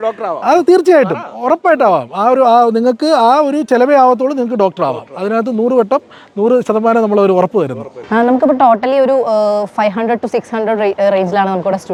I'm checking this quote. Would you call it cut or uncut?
uncut